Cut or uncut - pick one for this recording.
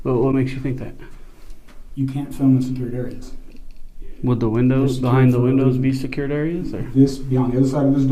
uncut